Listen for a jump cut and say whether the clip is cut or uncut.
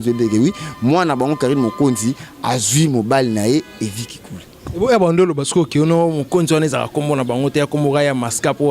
uncut